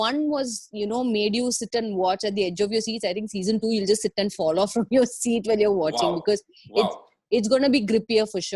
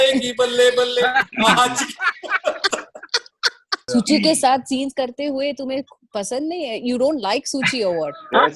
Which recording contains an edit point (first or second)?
second